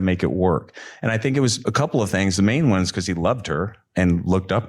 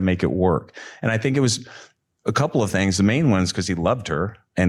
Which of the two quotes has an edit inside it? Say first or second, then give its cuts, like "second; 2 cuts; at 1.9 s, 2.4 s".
first; 1 cut; at 1.6 s